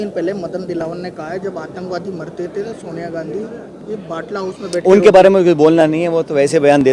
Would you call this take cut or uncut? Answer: uncut